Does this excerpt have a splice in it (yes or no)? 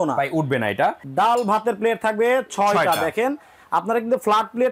yes